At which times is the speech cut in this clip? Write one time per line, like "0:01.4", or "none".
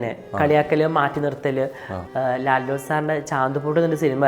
0:01.9